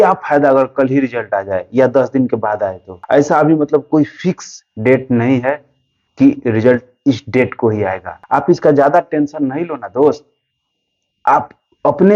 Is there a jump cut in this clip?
no; 0 cuts

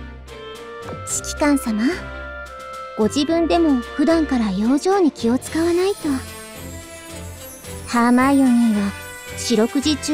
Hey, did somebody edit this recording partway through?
yes; 3 cuts; at 1.4 s, 6.2 s, 7.9 s

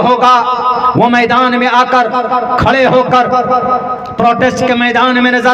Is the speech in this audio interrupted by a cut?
no; 0 cuts

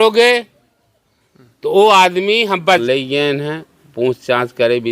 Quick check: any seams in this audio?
yes; 1 cut; at 2.7 s

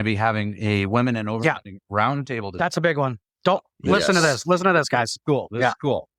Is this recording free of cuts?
yes; 0 cuts

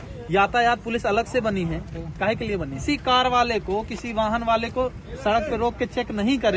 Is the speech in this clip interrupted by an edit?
yes; 1 cut; at 2.8 s

